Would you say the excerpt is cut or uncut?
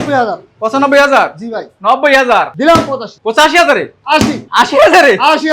cut